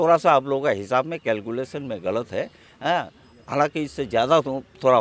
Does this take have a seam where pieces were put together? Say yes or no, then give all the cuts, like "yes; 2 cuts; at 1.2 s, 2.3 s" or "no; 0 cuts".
no; 0 cuts